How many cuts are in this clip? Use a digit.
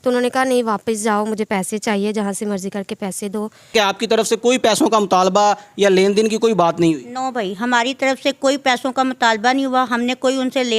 1